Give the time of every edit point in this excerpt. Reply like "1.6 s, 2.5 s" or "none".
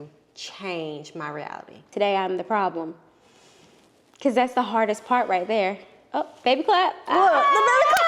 1.9 s